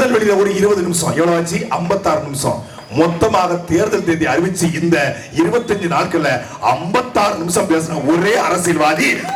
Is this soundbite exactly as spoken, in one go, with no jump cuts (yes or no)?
yes